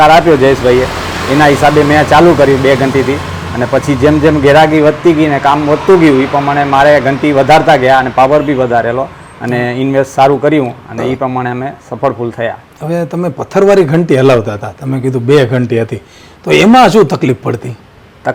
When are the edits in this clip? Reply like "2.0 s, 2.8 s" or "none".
none